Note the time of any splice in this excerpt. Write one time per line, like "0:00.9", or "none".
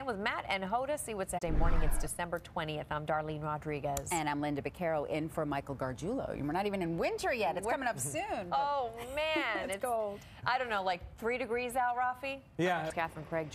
none